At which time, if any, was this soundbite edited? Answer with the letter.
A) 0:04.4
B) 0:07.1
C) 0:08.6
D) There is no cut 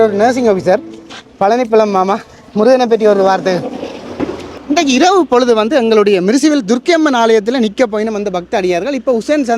A